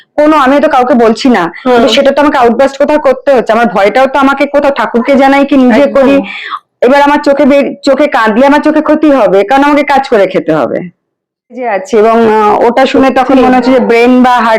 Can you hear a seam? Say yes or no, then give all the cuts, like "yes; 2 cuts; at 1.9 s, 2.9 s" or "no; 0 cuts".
yes; 1 cut; at 11.7 s